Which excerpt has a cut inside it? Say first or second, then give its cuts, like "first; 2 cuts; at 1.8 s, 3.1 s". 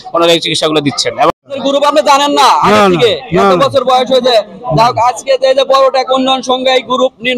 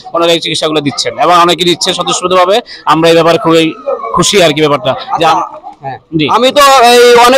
first; 1 cut; at 1.3 s